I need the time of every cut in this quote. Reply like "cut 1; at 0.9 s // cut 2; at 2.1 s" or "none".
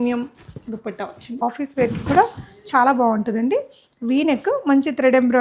cut 1; at 1.4 s